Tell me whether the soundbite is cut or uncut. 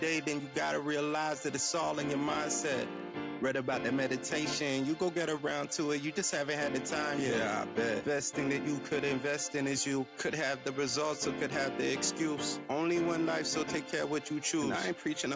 uncut